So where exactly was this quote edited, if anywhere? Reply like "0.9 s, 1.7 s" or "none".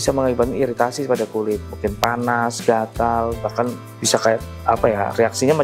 none